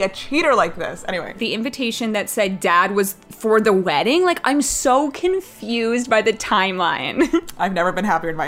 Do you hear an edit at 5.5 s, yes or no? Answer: no